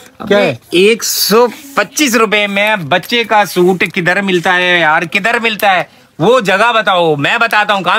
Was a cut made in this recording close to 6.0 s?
no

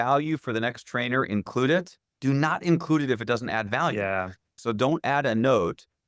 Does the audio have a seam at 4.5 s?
yes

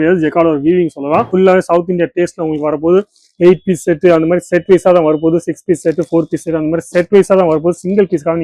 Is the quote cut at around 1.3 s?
yes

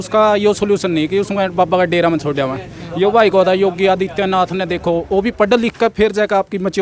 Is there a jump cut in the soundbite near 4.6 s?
no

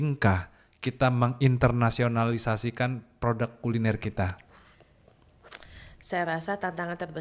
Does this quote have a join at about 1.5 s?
no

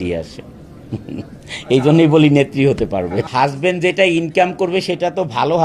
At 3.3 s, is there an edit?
yes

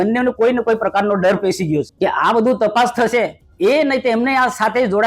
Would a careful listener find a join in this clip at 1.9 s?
yes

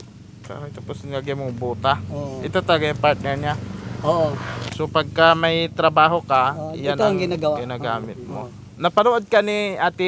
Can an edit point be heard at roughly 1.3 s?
no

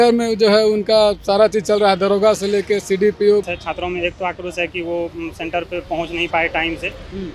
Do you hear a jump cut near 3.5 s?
yes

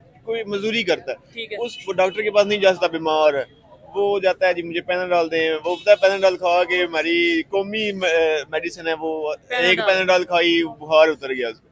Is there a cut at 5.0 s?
no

